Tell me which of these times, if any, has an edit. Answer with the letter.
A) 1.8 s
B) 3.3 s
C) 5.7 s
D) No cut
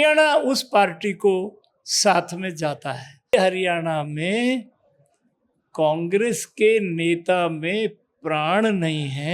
B